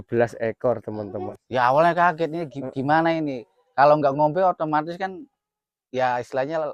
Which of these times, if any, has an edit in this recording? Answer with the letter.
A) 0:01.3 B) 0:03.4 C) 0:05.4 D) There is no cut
A